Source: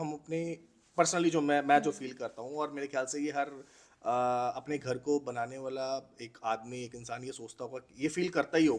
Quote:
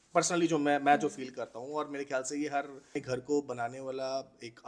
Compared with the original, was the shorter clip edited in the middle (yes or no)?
yes